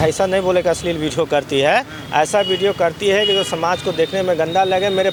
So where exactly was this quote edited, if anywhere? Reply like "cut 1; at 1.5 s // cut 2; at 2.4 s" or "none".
none